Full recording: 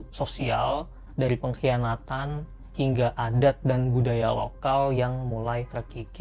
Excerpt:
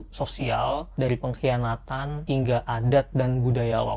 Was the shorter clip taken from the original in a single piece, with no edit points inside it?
no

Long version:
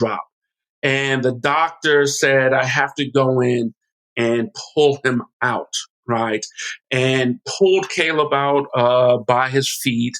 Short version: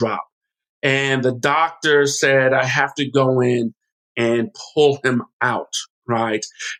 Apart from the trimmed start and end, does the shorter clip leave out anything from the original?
no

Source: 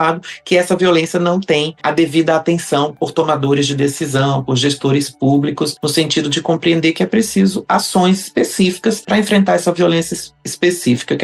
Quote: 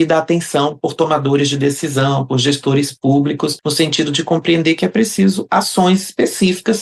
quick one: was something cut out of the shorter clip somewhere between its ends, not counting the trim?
no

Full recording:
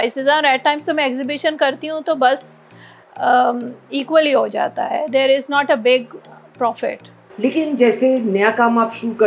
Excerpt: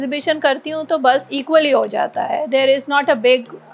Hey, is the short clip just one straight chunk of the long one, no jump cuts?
no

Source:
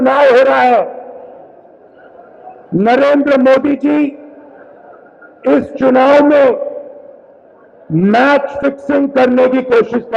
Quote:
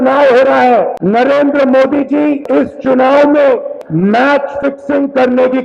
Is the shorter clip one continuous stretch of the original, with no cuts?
no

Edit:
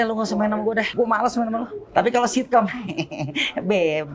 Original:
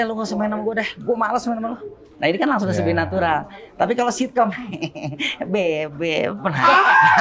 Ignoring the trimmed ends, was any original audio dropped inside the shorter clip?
yes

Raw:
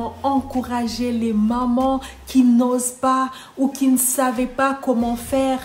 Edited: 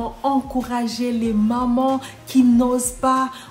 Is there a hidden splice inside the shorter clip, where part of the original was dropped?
no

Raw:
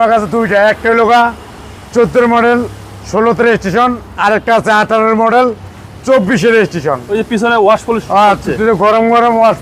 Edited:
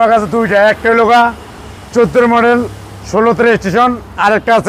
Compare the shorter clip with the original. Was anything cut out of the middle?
no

